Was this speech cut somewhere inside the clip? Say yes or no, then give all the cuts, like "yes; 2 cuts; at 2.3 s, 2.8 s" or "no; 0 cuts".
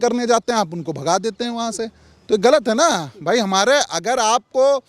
no; 0 cuts